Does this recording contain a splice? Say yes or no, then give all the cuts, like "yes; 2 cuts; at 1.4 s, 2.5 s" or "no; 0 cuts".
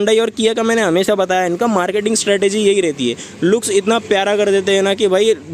no; 0 cuts